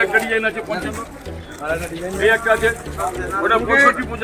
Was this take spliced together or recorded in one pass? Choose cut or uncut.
uncut